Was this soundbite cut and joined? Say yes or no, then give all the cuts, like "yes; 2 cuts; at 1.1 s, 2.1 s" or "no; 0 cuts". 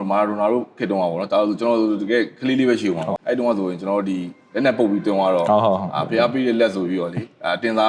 yes; 1 cut; at 3.1 s